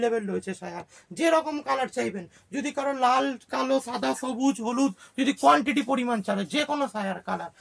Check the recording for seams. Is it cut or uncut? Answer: uncut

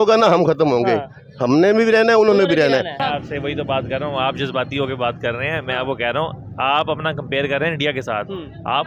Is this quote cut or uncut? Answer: cut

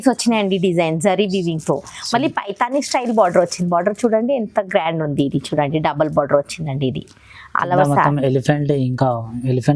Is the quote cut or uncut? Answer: uncut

